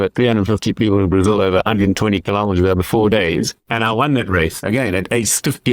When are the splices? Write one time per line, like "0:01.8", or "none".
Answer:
0:03.6
0:04.6